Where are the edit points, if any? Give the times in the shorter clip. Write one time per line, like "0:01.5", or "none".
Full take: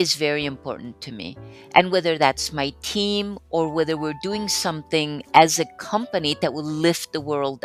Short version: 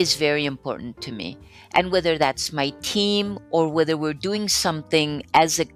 none